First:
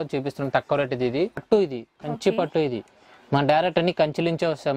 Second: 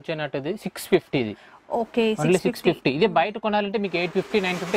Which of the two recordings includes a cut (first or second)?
first